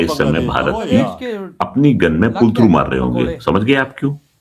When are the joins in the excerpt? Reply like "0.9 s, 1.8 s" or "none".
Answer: none